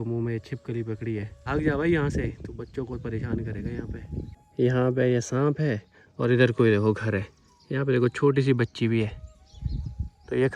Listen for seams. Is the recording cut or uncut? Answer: uncut